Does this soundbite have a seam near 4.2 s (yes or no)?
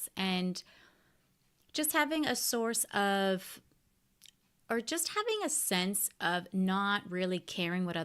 no